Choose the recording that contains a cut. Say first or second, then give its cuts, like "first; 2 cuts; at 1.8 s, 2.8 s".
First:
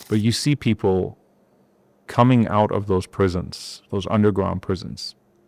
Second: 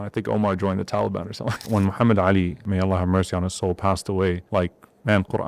second; 3 cuts; at 1.6 s, 2.6 s, 4.4 s